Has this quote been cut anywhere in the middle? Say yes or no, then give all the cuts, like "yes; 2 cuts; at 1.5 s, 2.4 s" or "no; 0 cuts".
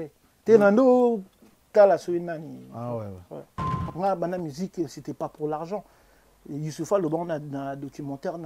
yes; 1 cut; at 3.9 s